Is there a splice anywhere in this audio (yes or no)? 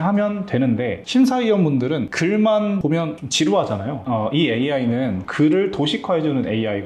yes